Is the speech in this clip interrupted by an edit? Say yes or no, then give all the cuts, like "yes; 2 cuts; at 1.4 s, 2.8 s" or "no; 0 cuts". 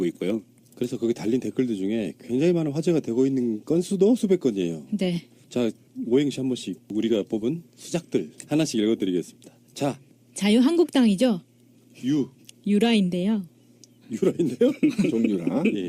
yes; 1 cut; at 2.7 s